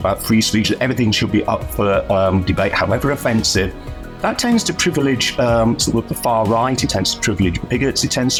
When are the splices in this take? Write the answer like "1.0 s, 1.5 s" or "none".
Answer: none